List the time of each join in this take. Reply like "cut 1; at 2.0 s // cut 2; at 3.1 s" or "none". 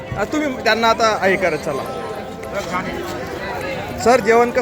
none

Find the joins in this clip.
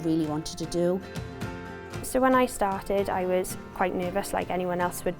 cut 1; at 1.4 s

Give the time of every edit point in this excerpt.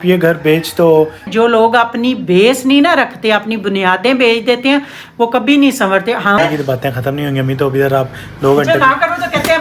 cut 1; at 1.2 s // cut 2; at 6.4 s

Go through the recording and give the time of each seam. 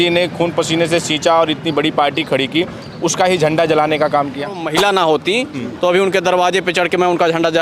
cut 1; at 4.6 s

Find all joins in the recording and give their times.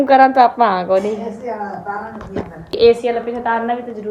cut 1; at 2.8 s

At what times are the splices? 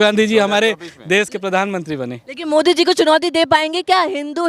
none

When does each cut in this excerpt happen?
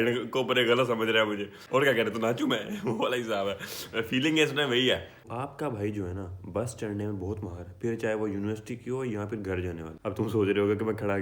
cut 1; at 1.6 s // cut 2; at 5.2 s // cut 3; at 9.9 s

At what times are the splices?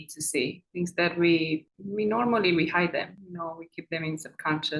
none

